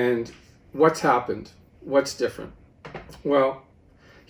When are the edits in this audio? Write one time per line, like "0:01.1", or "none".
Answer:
none